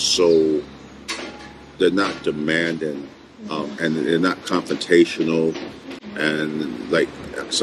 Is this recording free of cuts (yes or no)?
yes